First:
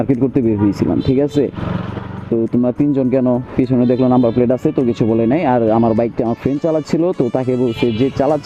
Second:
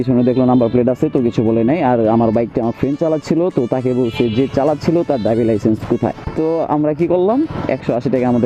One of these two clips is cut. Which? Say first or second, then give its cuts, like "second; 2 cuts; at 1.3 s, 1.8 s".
second; 1 cut; at 6.2 s